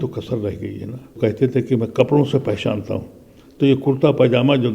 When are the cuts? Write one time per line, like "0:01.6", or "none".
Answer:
0:01.1